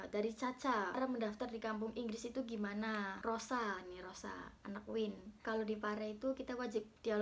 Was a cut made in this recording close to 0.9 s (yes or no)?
yes